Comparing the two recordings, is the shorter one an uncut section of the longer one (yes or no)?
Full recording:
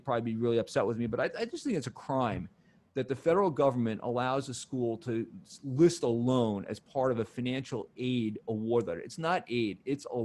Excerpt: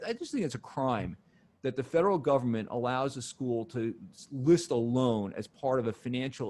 yes